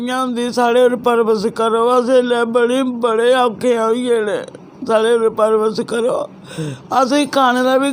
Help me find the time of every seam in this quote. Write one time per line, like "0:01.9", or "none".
none